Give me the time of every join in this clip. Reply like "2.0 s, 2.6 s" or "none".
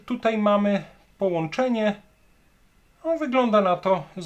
none